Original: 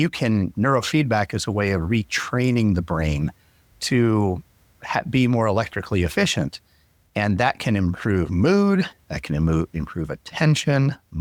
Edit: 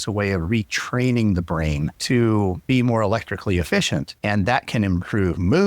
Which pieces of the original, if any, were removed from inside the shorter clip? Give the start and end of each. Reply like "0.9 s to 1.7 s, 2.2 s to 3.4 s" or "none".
3.3 s to 3.7 s, 4.4 s to 5.1 s, 6.6 s to 7.0 s